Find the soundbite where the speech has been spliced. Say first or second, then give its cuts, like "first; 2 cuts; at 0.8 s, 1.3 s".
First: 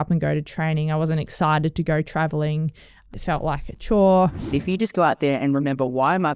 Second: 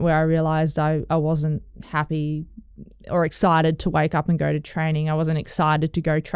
first; 2 cuts; at 3.1 s, 4.4 s